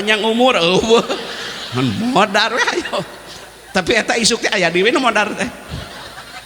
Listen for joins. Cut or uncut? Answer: uncut